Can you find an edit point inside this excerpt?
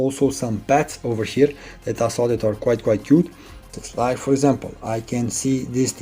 yes; 1 cut; at 3.8 s

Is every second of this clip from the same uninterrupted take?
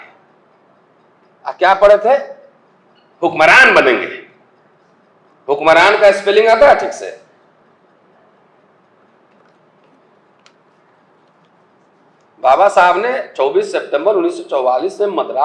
yes; 0 cuts

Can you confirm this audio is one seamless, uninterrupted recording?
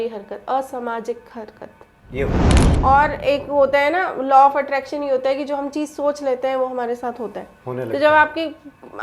no; 1 cut; at 2.5 s

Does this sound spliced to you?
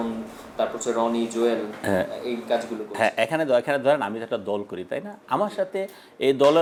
no; 0 cuts

